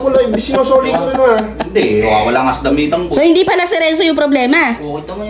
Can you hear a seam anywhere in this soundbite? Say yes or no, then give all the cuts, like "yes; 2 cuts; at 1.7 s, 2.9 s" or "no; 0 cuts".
no; 0 cuts